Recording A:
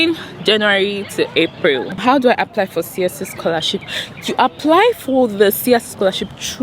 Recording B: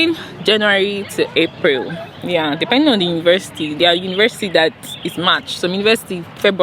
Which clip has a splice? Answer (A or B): A